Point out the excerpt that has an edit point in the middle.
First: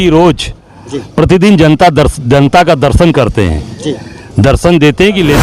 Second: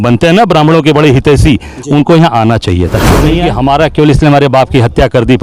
second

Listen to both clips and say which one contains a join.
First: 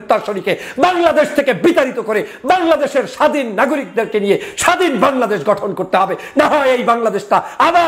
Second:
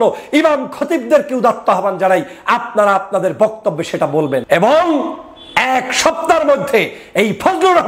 second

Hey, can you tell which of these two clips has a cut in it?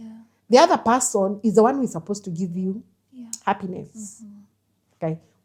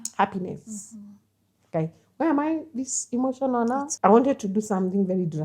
second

